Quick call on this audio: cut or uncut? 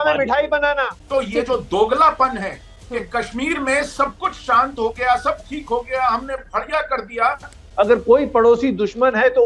cut